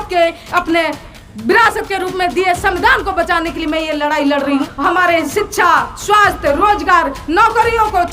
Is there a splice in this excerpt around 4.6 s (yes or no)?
yes